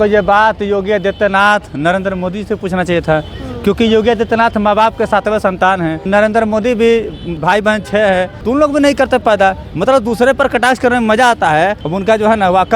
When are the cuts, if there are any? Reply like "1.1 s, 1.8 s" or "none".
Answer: 6.1 s, 7.3 s, 8.3 s, 11.8 s